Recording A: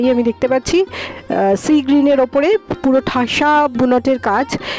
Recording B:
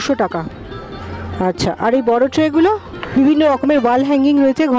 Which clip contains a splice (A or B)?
B